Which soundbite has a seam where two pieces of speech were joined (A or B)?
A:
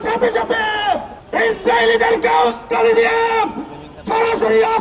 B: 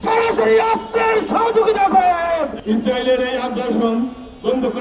B